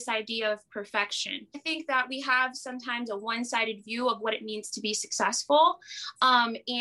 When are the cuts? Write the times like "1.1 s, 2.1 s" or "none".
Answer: 1.6 s